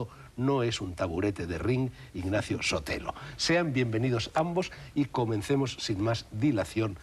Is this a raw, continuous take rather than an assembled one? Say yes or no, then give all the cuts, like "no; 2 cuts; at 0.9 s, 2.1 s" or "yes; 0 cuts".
no; 1 cut; at 2.4 s